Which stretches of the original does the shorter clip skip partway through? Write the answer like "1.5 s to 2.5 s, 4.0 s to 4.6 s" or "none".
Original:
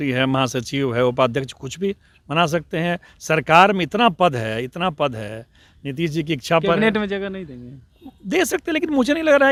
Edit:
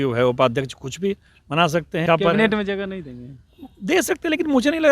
2.8 s to 6.5 s